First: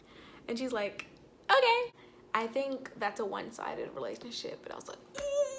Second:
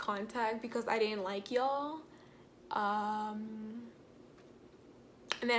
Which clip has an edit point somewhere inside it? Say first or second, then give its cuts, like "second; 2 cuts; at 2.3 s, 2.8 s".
first; 1 cut; at 2.0 s